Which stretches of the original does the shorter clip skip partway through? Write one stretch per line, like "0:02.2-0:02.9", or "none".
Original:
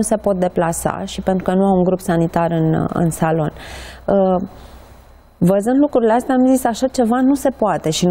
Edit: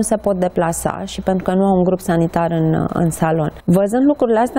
0:03.5-0:05.3